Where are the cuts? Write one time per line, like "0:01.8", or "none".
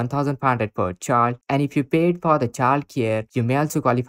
none